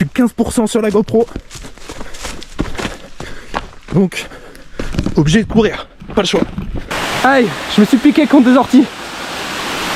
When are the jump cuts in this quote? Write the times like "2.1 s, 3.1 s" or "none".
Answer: 6.8 s